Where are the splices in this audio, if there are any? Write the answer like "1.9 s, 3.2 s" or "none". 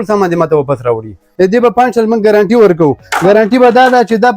1.2 s